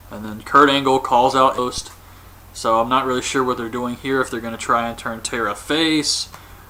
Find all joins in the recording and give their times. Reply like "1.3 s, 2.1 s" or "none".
none